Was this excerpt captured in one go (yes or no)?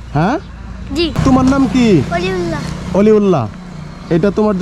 no